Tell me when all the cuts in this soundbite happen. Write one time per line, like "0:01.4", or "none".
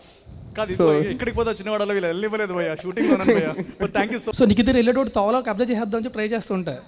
0:04.2